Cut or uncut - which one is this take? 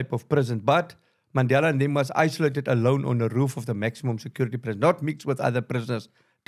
uncut